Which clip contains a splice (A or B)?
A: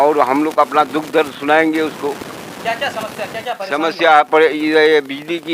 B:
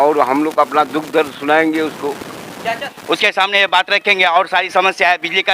B